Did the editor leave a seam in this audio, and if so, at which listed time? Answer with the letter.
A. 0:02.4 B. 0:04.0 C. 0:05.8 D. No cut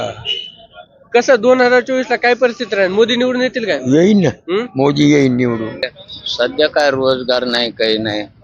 C